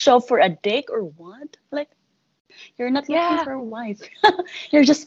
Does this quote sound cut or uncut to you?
uncut